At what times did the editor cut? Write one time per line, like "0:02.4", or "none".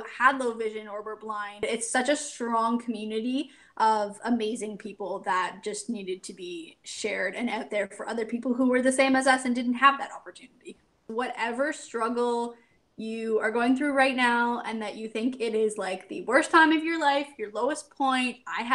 0:01.6
0:11.1